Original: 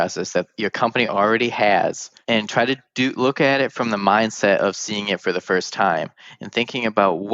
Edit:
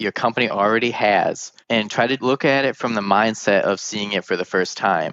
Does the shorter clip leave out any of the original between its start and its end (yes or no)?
yes